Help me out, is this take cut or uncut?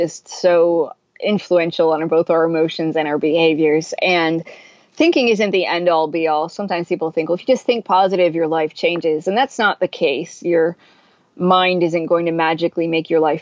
uncut